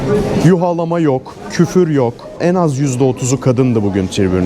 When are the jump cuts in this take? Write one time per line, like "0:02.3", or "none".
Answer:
0:02.4